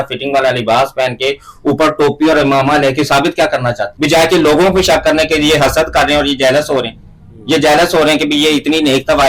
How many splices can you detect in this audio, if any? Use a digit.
1